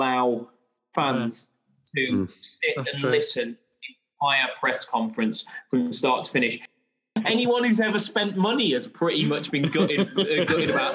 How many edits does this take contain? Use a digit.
1